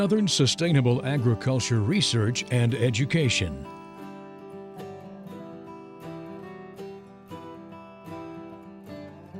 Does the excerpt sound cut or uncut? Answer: uncut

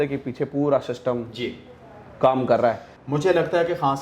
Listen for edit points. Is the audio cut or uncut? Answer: cut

